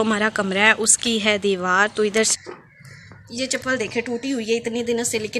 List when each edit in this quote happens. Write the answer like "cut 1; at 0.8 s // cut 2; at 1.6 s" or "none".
cut 1; at 2.3 s